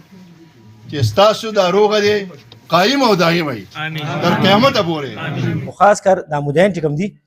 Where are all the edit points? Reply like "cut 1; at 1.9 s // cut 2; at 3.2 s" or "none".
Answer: cut 1; at 5.6 s